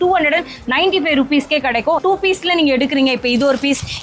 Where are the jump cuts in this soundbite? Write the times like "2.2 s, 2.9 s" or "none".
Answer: 2.0 s